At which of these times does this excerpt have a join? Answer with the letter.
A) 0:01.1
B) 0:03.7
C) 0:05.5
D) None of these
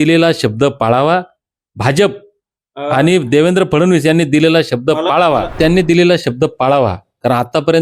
C